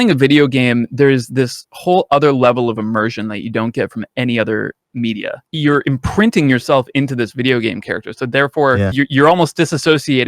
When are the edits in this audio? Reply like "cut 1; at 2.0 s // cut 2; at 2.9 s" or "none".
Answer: cut 1; at 5.5 s // cut 2; at 8.9 s